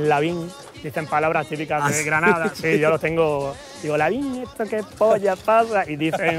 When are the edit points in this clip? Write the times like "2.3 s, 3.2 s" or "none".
none